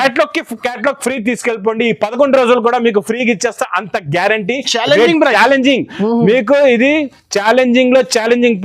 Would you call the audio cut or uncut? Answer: uncut